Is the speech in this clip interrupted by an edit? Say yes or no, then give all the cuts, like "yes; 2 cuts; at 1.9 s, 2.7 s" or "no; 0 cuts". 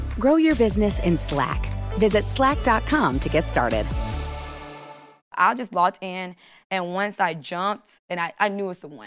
yes; 1 cut; at 5.3 s